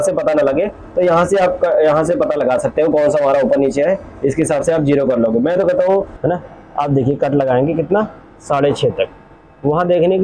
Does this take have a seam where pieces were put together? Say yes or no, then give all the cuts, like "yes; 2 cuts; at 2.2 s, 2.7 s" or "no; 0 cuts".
yes; 1 cut; at 6.1 s